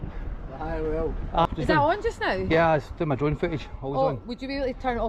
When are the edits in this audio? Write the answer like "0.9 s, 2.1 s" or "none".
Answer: 1.4 s